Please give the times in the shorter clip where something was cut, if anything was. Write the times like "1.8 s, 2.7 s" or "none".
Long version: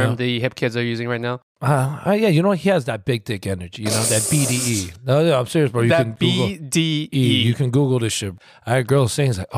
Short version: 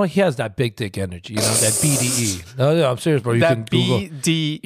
none